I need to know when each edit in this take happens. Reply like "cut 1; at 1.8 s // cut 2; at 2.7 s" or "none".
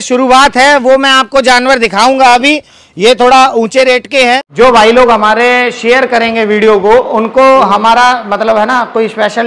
cut 1; at 4.5 s

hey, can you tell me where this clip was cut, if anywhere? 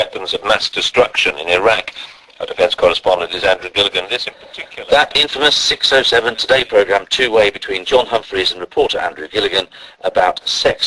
cut 1; at 6.4 s

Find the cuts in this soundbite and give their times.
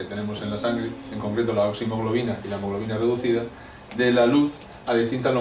cut 1; at 3.4 s

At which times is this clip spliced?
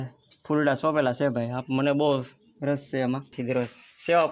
cut 1; at 3.4 s

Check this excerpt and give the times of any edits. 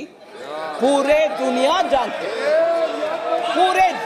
none

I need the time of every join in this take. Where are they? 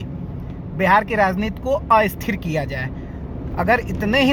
none

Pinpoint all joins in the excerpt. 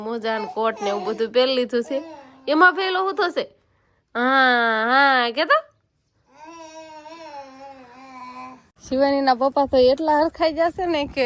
cut 1; at 8.7 s

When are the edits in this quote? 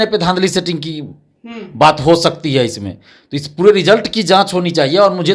none

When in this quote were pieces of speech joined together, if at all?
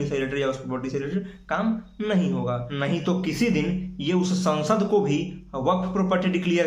cut 1; at 2.7 s

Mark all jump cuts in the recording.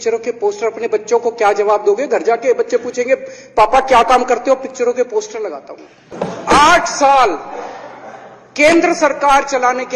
cut 1; at 6.0 s

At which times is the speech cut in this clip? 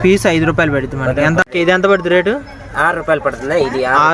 cut 1; at 1.4 s

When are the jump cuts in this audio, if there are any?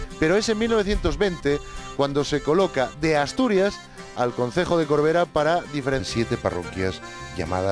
none

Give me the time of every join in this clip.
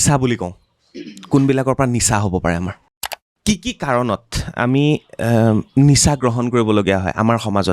cut 1; at 3.3 s

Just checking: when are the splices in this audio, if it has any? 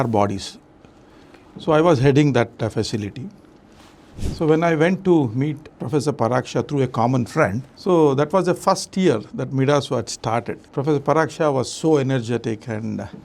cut 1; at 5.8 s // cut 2; at 7.7 s // cut 3; at 10.6 s

